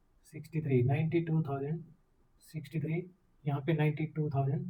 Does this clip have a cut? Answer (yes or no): no